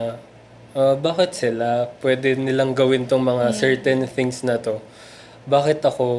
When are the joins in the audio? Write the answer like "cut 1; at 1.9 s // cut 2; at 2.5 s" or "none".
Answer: none